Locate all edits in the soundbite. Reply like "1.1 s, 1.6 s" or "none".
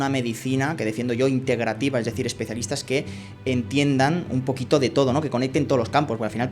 none